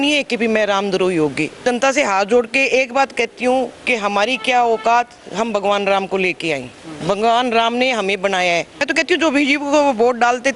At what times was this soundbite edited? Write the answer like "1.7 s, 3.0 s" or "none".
1.6 s, 8.8 s